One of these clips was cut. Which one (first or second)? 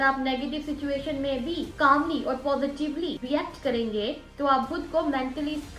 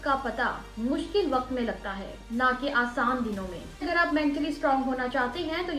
second